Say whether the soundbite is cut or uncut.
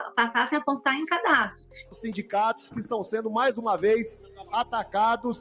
cut